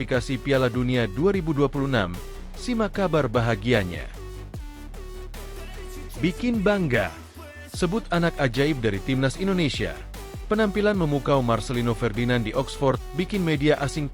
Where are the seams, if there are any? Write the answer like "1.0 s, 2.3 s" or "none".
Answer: 4.5 s, 6.2 s